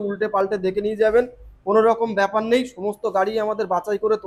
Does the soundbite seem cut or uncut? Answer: uncut